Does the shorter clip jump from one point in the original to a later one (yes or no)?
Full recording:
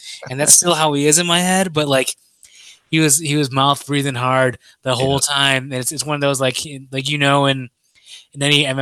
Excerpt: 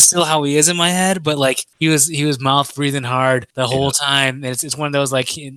yes